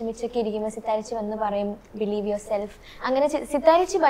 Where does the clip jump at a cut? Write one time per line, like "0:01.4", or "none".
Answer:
none